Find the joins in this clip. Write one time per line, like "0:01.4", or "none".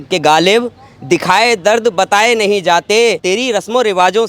0:03.2